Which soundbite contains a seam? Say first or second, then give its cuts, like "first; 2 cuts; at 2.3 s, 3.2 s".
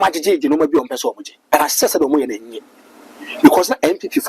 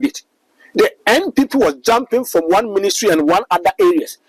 first; 1 cut; at 1.3 s